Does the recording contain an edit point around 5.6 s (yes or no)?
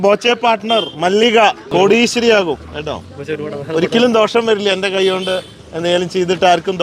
no